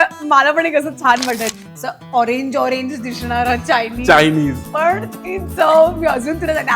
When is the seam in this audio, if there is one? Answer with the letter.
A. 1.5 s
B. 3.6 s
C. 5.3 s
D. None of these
A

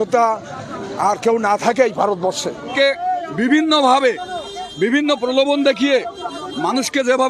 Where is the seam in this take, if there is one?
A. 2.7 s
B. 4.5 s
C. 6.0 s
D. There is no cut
A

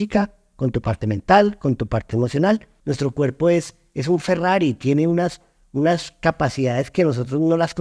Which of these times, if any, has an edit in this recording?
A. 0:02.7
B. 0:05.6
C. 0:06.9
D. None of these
A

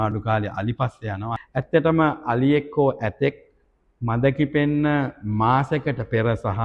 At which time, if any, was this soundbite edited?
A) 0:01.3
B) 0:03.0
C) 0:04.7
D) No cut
A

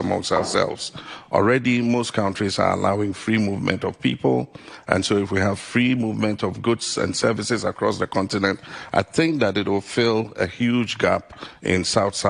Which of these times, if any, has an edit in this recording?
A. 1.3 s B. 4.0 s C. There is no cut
C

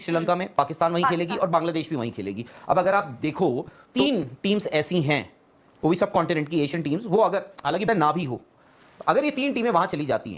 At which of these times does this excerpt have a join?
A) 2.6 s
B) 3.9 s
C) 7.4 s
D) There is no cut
B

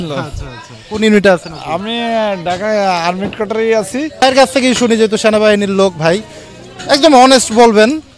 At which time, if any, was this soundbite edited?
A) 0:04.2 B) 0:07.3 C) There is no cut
A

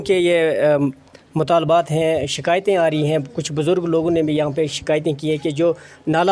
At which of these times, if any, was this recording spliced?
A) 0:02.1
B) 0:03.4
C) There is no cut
C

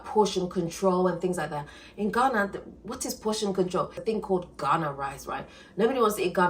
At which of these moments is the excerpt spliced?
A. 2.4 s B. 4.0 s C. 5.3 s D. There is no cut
B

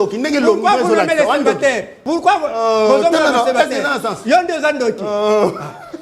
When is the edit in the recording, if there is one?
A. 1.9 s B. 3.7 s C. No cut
A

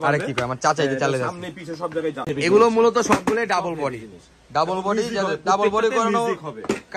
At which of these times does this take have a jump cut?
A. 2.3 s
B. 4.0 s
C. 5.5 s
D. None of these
A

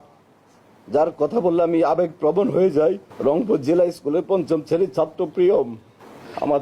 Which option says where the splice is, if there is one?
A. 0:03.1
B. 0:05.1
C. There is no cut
C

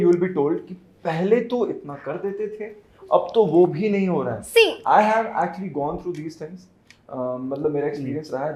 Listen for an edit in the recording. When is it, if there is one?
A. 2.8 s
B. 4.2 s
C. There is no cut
C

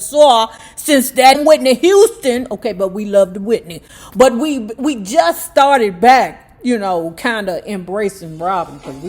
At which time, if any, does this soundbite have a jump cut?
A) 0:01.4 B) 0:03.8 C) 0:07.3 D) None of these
A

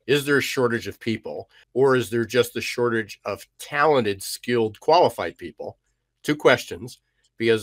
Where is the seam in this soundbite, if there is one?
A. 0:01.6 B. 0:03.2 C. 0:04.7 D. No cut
A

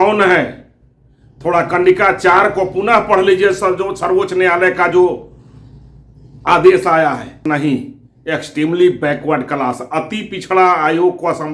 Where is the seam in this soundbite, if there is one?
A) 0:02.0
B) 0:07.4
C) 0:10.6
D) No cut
B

